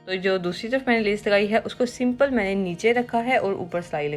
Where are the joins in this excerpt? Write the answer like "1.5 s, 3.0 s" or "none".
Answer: none